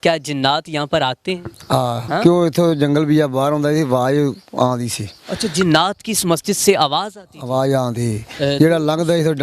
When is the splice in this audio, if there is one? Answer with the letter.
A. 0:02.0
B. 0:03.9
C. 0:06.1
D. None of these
A